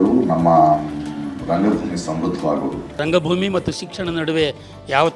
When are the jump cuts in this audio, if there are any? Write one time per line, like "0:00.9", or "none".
0:03.0